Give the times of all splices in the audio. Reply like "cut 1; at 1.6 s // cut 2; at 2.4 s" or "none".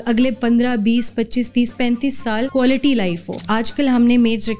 cut 1; at 2.5 s // cut 2; at 3.4 s